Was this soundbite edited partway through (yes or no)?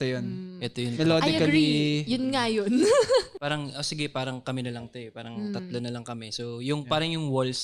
yes